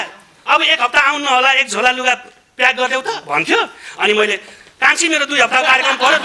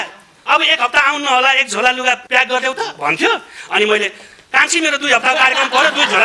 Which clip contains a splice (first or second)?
second